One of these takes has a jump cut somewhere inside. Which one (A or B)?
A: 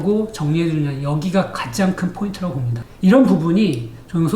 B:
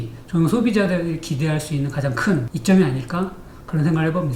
A